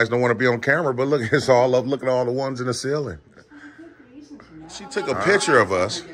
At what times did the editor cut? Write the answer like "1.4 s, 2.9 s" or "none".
4.9 s